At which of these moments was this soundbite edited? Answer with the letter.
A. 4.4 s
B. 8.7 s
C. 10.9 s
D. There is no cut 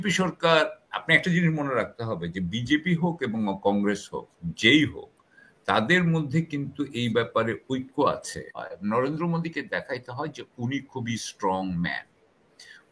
B